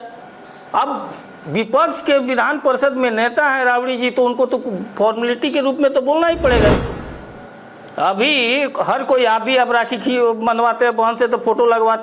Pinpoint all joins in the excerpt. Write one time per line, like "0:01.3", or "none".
0:06.8